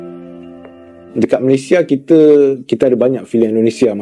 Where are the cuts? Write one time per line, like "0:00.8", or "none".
0:01.0